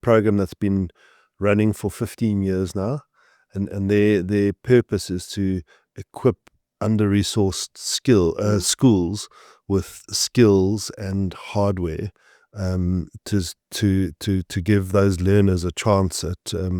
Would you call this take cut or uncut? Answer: uncut